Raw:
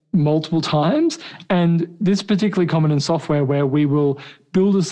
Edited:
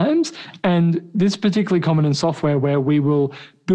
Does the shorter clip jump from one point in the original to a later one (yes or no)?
no